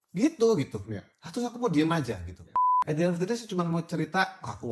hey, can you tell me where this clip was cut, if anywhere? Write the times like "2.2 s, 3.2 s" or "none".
2.6 s